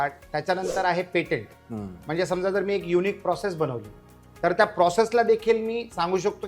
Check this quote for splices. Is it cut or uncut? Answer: uncut